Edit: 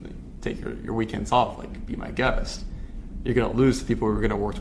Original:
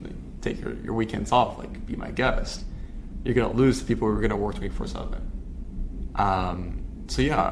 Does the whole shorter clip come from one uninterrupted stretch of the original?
yes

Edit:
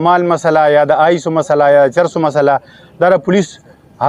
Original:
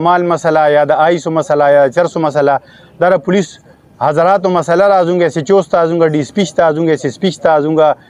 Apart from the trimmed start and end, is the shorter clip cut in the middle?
no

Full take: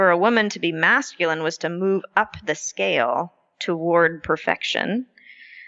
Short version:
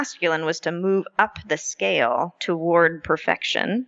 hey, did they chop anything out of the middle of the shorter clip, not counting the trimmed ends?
yes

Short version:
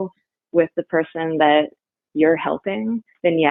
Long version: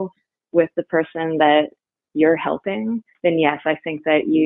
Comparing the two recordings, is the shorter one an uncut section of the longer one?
yes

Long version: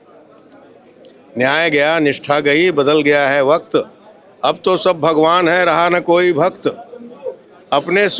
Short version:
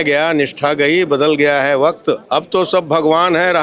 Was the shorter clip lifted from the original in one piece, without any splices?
no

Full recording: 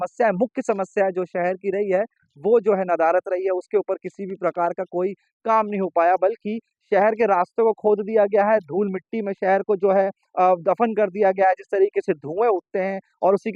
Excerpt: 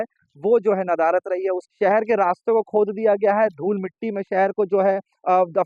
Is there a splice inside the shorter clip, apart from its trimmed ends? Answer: yes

